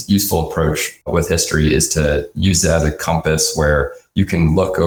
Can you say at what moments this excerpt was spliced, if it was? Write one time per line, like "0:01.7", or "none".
none